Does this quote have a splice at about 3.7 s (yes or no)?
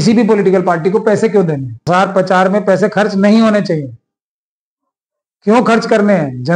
no